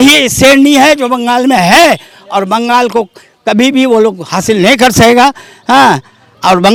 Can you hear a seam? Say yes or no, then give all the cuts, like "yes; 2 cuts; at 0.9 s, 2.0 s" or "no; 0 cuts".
no; 0 cuts